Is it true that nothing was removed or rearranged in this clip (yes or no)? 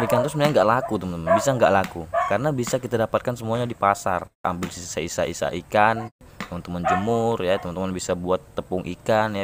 no